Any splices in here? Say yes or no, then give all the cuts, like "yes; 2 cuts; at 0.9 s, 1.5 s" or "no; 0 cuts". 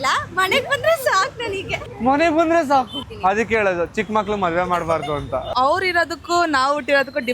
yes; 2 cuts; at 3.0 s, 5.5 s